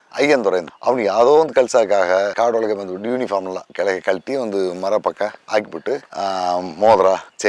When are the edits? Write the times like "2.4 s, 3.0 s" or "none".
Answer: none